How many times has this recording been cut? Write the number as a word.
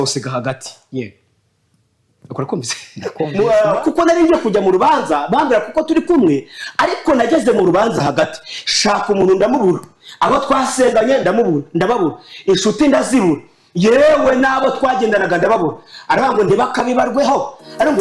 one